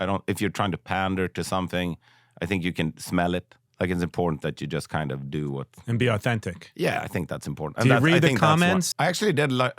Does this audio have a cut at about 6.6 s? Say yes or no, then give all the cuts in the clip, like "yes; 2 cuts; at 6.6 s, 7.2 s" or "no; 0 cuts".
no; 2 cuts; at 3.6 s, 8.9 s